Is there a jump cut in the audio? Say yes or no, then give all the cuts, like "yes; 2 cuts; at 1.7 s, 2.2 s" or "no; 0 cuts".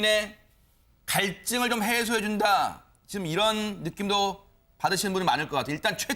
yes; 1 cut; at 4.3 s